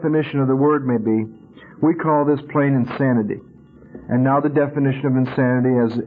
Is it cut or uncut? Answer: uncut